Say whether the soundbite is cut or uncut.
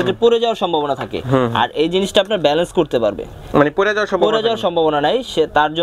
uncut